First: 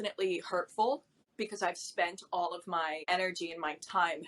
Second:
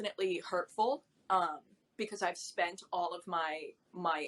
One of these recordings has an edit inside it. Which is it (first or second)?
first